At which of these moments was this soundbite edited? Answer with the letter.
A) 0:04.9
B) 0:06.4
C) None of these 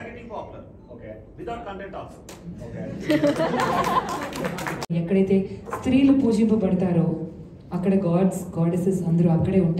A